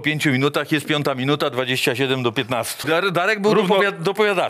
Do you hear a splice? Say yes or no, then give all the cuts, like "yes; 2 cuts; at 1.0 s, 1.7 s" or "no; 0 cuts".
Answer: yes; 1 cut; at 2.8 s